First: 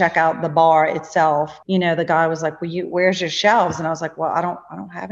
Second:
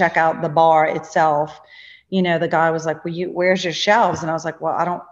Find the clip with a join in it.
first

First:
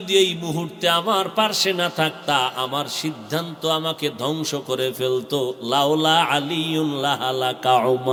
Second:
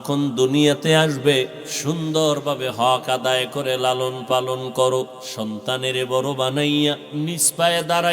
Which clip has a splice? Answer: second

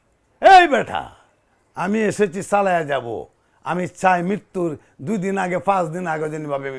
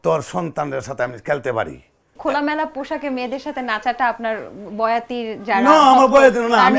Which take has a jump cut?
second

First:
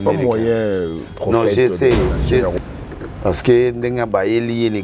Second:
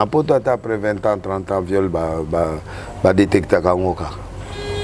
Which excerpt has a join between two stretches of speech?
first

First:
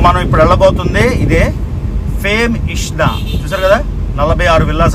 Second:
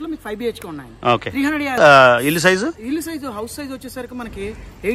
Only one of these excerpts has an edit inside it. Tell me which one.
second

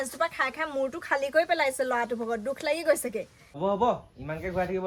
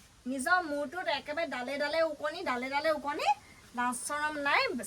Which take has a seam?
first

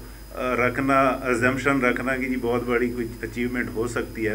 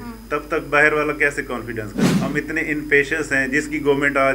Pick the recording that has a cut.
second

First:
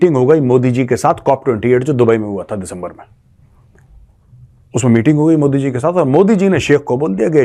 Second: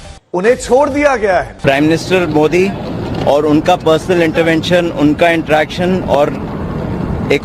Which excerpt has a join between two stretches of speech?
second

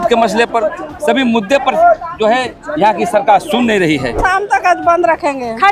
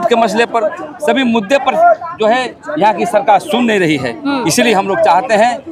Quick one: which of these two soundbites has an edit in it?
first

